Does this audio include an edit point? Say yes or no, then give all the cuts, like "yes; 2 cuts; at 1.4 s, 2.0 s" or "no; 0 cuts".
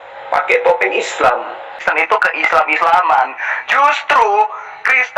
yes; 1 cut; at 1.8 s